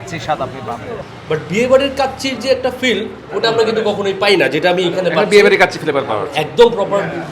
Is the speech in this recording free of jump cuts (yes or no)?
no